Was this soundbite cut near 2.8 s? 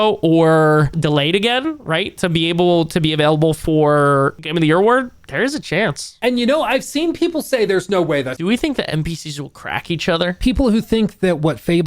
no; 5 cuts; at 0.9 s, 4.4 s, 6.1 s, 8.3 s, 10.4 s

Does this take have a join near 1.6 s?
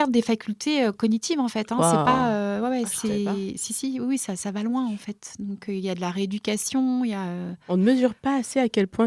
no; 0 cuts

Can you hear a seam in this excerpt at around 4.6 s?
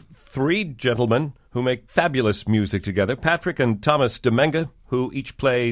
no; 1 cut; at 1.8 s

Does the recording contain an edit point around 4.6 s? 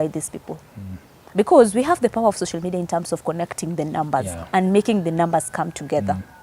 no; 0 cuts

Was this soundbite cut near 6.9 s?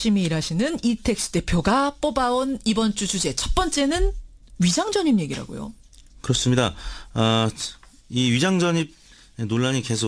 yes; 1 cut; at 6.9 s

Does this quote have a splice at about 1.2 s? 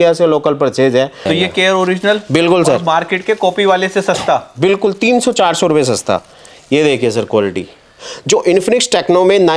yes; 1 cut; at 1.2 s

